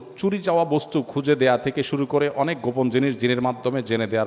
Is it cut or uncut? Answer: uncut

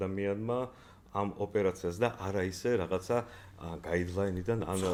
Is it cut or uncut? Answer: uncut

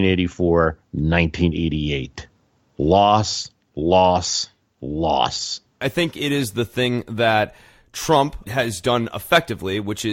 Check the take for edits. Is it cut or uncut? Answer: cut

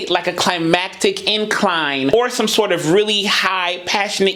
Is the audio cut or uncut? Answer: uncut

